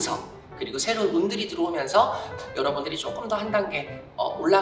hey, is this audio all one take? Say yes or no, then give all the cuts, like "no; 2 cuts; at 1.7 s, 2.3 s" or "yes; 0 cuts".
no; 1 cut; at 2.3 s